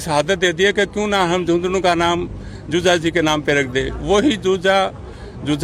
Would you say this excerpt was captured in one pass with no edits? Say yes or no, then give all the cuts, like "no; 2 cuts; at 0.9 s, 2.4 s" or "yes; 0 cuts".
yes; 0 cuts